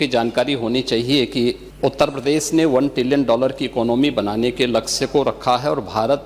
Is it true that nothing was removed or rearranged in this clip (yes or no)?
no